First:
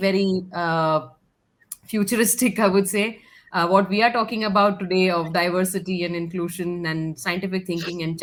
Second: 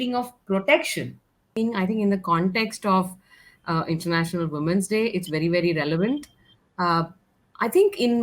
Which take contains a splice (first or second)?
second